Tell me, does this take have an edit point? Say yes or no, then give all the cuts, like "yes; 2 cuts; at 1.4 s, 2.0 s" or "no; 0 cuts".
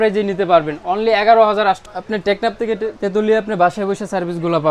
yes; 1 cut; at 1.9 s